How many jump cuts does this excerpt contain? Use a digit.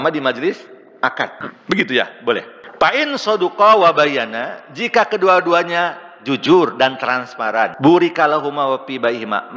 3